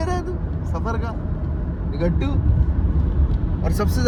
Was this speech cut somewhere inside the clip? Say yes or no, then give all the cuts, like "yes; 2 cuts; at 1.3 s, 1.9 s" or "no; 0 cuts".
no; 0 cuts